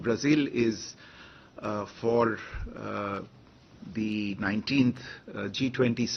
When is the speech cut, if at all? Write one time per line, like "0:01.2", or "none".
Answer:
none